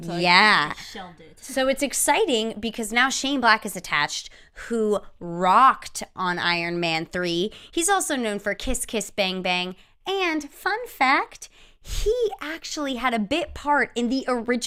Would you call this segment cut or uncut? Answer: uncut